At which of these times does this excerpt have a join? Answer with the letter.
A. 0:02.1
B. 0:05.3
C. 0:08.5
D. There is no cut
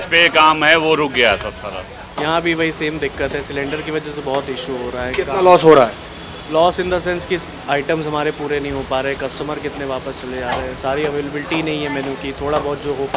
A